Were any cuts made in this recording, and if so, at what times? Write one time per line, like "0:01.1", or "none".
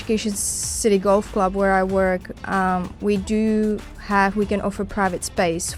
none